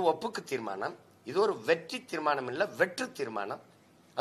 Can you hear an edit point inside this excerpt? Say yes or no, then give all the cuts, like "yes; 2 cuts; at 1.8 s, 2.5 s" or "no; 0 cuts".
no; 0 cuts